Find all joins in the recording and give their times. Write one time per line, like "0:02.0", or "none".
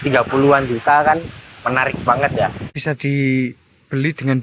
0:02.8